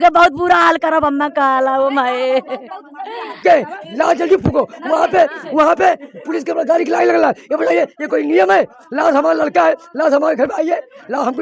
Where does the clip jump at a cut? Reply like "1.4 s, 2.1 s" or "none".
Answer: 3.3 s